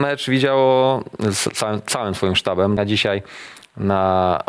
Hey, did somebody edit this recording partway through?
yes; 1 cut; at 2.8 s

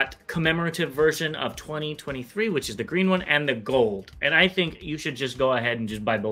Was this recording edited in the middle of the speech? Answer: no; 0 cuts

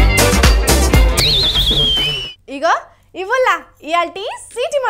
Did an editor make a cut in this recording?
no; 0 cuts

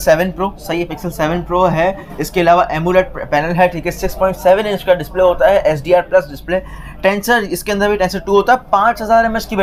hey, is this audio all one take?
yes; 0 cuts

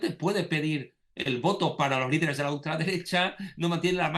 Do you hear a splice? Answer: no; 0 cuts

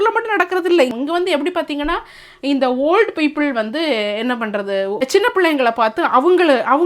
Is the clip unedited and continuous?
no; 2 cuts; at 0.9 s, 5.0 s

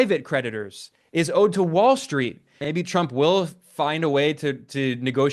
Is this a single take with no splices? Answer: no; 1 cut; at 2.6 s

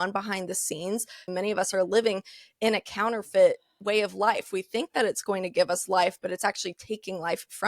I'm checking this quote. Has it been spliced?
yes; 1 cut; at 1.6 s

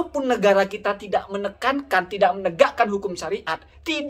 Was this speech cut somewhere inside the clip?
no; 0 cuts

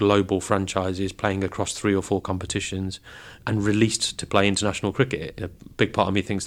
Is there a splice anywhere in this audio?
yes; 1 cut; at 5.3 s

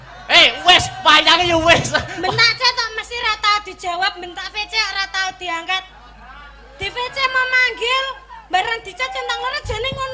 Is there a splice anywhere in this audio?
no; 0 cuts

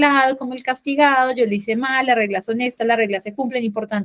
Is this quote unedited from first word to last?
yes; 0 cuts

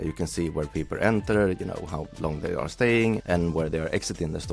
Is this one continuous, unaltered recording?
yes; 0 cuts

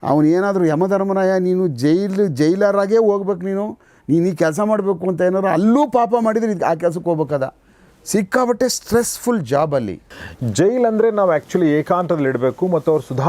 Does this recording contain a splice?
yes; 1 cut; at 10.1 s

